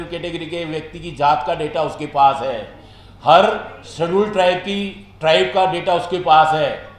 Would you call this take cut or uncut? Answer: uncut